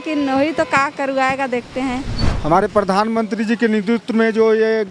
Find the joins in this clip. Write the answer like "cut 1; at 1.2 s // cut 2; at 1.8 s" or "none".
cut 1; at 2.2 s